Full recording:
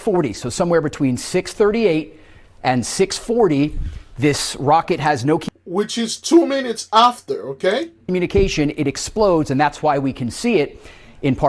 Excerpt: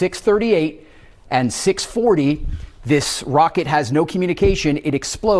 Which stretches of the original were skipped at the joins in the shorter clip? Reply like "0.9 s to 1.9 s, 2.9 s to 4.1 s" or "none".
5.4 s to 8.0 s